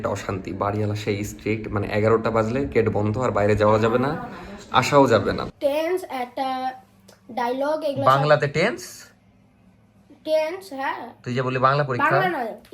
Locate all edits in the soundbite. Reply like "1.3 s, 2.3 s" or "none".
5.5 s